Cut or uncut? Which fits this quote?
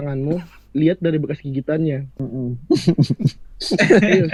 uncut